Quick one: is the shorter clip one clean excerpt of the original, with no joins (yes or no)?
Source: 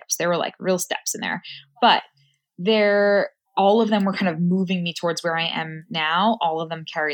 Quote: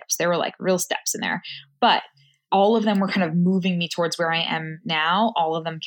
no